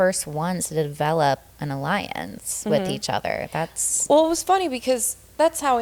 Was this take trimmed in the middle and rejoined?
no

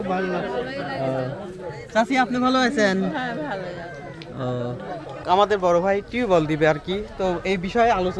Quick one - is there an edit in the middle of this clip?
yes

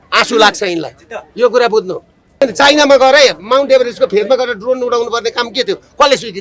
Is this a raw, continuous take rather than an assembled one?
no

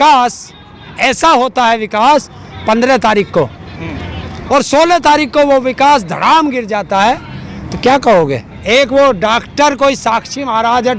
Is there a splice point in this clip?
yes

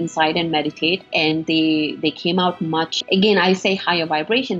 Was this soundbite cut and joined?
yes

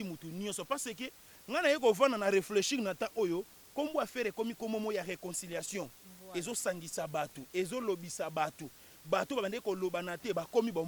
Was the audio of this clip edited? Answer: no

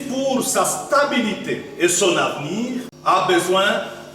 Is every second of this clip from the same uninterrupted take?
no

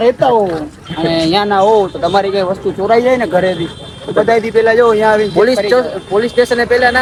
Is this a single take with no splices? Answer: yes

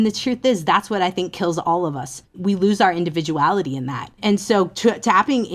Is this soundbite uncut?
no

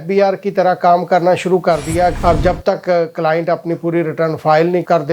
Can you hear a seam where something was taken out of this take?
yes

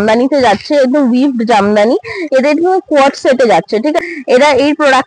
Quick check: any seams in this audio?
yes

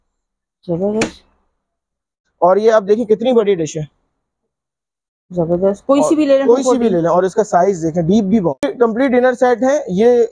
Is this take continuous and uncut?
no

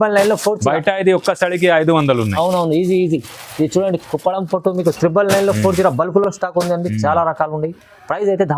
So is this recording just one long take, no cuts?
yes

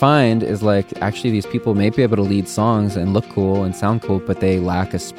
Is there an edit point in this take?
no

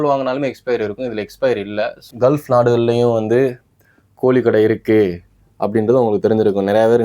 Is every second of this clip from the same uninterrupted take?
no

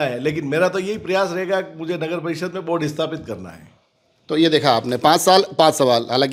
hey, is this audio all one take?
yes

